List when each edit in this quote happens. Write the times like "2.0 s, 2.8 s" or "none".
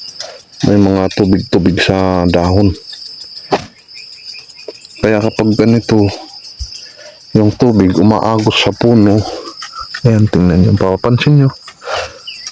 none